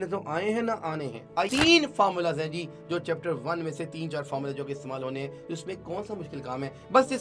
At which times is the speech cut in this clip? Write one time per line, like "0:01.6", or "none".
0:01.5